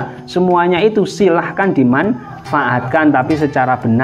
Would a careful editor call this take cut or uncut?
uncut